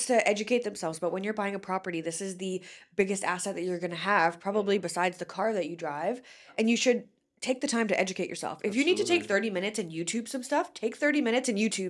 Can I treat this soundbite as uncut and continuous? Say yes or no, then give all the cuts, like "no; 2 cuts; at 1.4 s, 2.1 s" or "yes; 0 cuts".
yes; 0 cuts